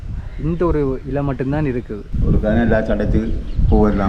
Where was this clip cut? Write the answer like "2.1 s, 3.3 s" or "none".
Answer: 2.0 s